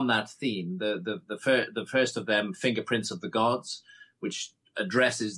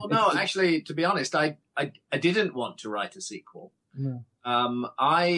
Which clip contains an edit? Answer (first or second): second